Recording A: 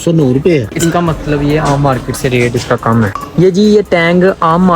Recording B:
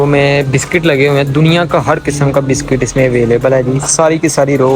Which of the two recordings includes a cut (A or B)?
A